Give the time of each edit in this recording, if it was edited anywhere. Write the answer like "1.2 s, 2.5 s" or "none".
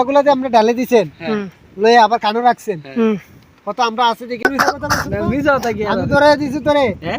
4.4 s